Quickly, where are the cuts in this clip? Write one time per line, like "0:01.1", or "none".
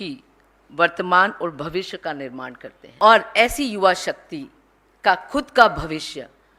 0:02.8